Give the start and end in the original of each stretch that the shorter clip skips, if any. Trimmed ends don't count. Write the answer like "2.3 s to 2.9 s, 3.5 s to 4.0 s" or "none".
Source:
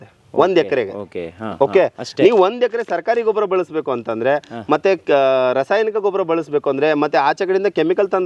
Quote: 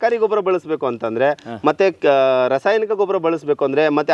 none